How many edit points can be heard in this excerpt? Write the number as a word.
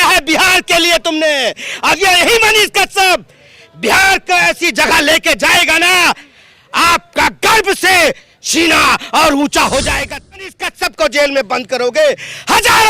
one